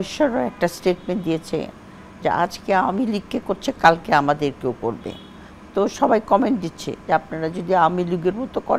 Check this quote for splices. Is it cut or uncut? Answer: uncut